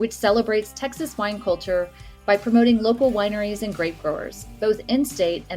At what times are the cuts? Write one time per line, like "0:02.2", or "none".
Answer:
none